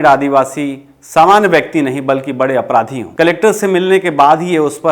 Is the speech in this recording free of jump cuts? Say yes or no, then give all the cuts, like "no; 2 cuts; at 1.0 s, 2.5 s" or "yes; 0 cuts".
no; 1 cut; at 3.0 s